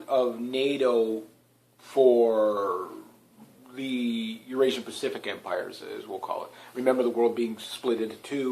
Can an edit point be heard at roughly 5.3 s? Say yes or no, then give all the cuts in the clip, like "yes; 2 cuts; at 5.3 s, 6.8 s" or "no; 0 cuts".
yes; 1 cut; at 5.3 s